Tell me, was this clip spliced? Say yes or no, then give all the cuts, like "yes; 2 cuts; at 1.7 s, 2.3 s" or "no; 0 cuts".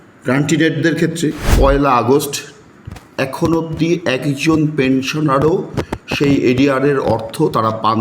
yes; 1 cut; at 1.5 s